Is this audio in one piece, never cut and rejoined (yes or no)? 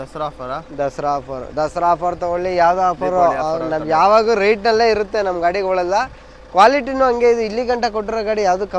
yes